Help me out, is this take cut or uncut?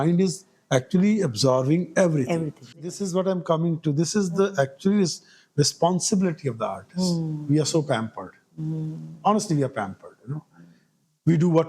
cut